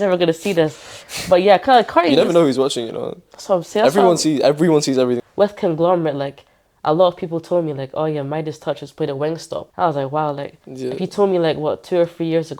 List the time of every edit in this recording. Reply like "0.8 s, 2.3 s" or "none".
5.2 s, 9.7 s